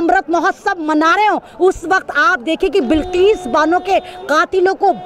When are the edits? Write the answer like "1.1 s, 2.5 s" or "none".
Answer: none